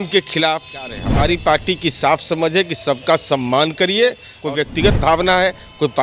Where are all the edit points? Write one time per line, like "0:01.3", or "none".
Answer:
0:01.0
0:04.3